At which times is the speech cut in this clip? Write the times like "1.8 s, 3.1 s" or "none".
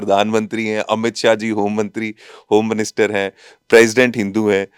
none

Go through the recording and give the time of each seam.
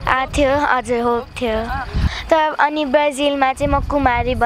2.1 s

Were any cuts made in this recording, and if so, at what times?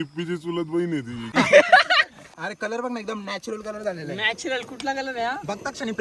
2.4 s

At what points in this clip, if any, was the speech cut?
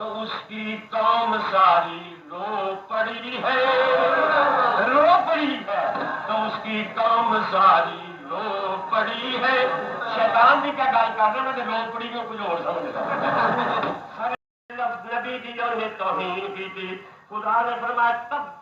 14.3 s

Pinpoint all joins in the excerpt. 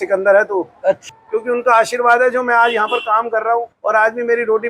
1.1 s, 3.7 s

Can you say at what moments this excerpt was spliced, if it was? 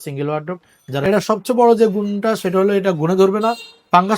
1.0 s

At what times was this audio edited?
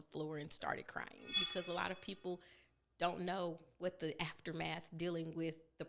1.4 s

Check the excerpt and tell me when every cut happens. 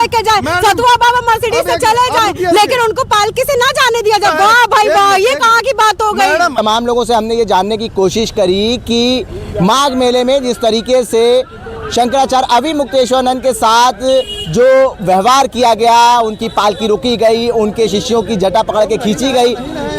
none

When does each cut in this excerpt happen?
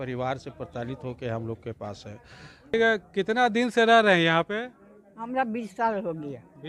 2.7 s

